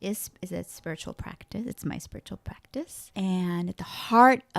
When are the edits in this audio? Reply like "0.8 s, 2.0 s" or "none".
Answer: 3.0 s